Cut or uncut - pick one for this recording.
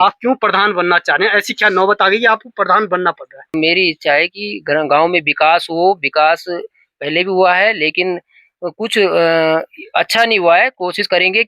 cut